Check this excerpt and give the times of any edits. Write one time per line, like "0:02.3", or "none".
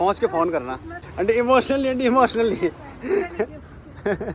0:01.0